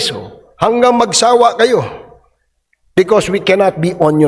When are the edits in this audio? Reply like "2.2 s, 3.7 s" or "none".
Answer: none

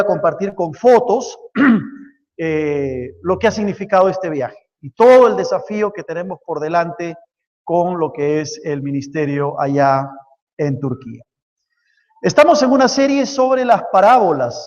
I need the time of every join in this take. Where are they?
10.8 s

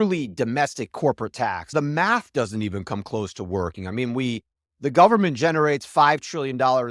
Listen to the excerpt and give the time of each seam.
1.7 s

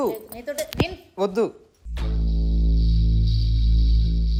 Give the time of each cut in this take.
none

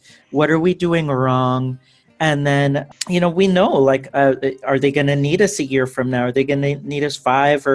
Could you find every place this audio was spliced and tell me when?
2.9 s

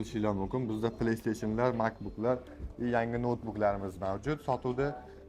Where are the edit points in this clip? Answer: none

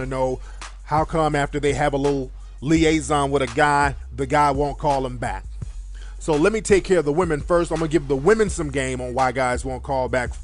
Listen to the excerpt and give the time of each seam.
4.0 s

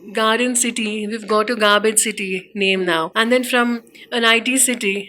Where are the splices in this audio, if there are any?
3.1 s

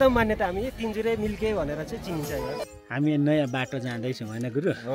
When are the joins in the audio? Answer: 2.6 s

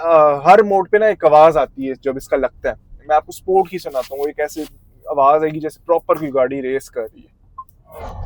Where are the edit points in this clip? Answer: none

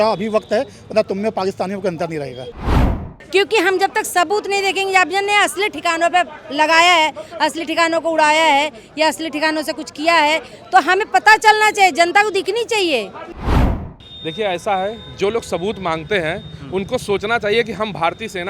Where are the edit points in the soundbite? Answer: 2.6 s, 13.5 s

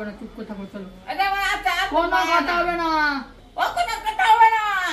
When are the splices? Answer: none

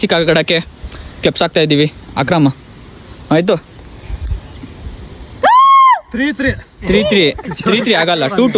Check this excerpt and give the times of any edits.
none

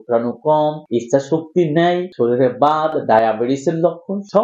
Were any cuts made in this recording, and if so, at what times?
none

